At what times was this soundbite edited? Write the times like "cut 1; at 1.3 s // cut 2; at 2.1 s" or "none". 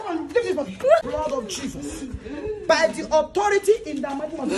cut 1; at 1.1 s